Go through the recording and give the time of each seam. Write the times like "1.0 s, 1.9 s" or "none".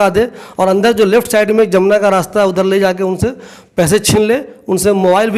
none